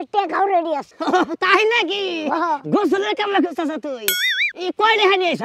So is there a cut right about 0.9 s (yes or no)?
yes